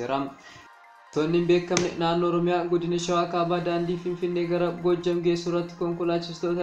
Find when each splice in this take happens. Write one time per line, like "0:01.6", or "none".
0:01.1

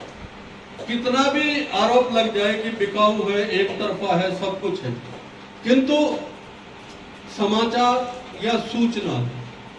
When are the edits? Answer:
none

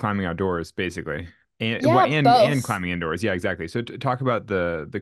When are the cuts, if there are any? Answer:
none

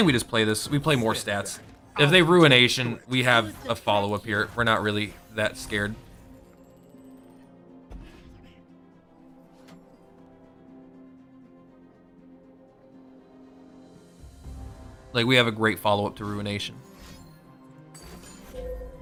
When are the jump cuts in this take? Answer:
none

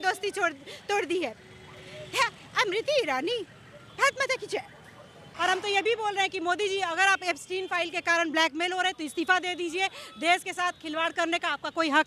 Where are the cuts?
0:05.2

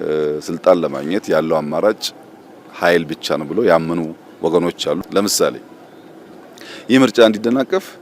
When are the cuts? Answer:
0:05.0

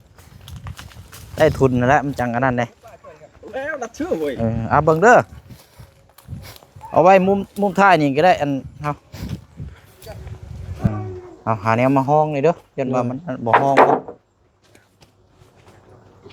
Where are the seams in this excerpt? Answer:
0:10.9

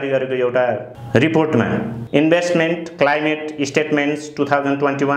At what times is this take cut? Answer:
0:00.9
0:02.0

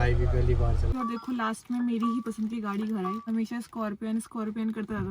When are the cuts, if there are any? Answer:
0:00.9
0:03.2

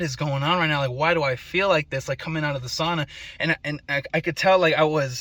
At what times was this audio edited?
none

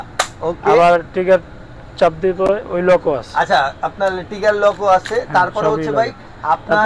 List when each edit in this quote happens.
none

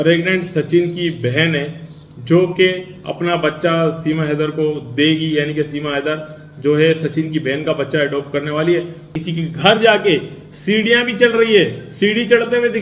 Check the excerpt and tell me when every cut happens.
0:09.1

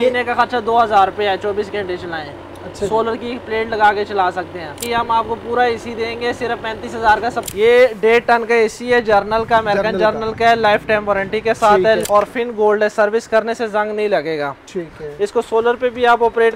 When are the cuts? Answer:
0:04.8
0:07.5
0:12.0

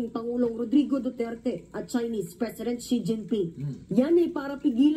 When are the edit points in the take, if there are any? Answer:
0:01.3
0:02.5

